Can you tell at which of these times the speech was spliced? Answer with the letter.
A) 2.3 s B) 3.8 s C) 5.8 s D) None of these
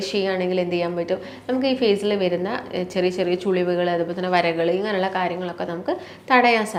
D